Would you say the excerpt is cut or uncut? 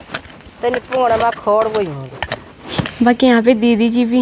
cut